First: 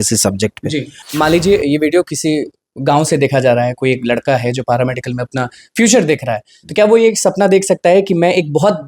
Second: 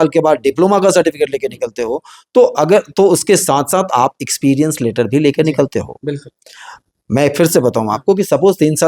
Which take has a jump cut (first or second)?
first